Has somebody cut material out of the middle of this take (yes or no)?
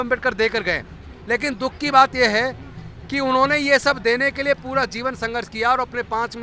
no